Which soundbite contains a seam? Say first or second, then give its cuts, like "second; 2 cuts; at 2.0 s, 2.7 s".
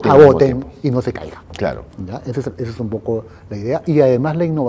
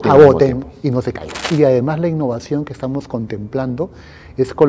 second; 1 cut; at 1.4 s